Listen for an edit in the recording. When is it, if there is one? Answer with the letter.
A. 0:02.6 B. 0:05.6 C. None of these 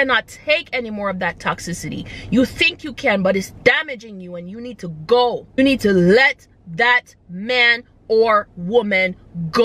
B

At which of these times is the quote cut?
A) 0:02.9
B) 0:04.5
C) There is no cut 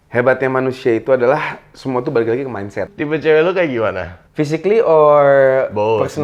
A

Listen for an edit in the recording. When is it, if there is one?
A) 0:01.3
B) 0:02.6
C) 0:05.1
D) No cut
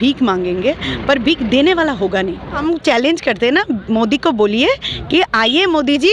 B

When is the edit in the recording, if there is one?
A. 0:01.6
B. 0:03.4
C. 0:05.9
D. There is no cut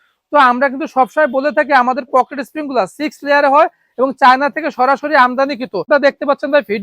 C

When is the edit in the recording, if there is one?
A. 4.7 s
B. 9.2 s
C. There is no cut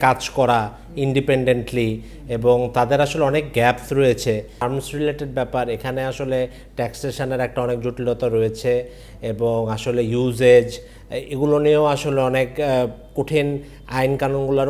A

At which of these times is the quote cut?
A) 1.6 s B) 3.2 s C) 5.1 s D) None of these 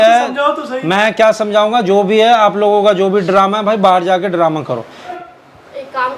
C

